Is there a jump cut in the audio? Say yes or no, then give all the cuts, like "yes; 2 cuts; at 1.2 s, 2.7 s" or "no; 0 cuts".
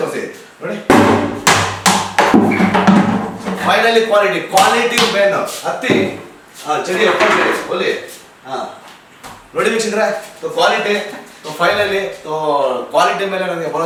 no; 0 cuts